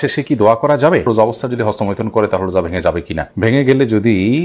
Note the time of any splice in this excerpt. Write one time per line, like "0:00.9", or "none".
0:01.1